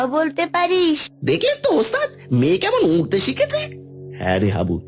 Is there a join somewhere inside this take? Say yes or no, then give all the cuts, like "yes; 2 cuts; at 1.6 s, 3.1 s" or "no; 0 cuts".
yes; 1 cut; at 1.1 s